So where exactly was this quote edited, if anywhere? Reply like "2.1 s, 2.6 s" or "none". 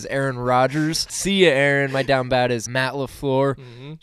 1.1 s, 2.7 s